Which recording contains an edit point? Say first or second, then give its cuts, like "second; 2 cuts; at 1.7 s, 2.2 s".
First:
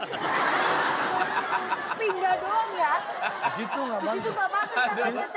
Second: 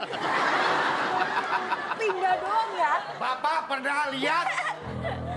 second; 1 cut; at 3.1 s